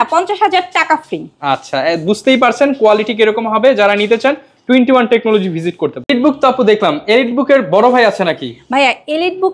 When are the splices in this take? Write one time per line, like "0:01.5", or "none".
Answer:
none